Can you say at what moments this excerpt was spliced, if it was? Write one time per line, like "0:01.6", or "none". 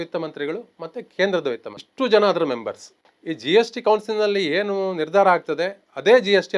0:01.8

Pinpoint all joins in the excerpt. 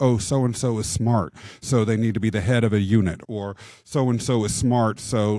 0:03.2

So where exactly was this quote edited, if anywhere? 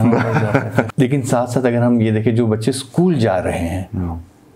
0:00.9

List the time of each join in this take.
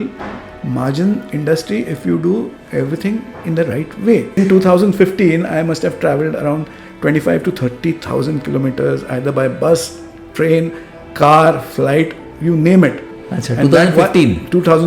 0:04.4

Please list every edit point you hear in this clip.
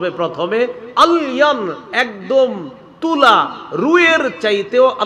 none

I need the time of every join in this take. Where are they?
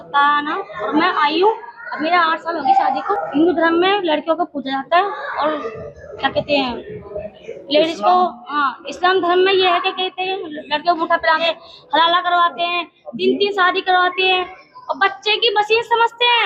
0:03.1
0:11.4

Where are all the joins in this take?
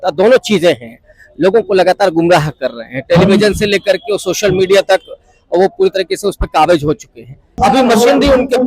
0:07.6

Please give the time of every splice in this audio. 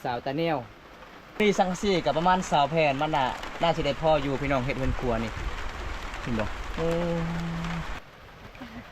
0:01.4
0:08.0

